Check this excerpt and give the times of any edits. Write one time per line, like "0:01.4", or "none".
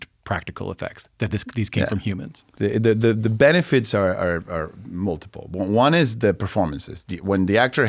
0:02.4